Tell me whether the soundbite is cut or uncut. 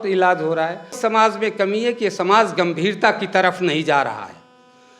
cut